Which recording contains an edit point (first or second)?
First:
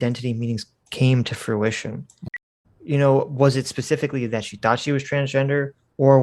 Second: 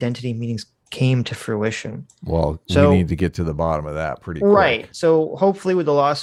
first